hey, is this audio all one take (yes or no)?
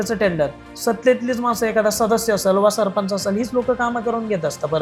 yes